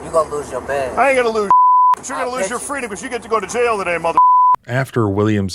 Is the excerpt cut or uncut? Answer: uncut